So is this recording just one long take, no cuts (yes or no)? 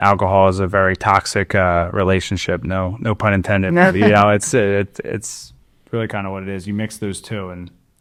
yes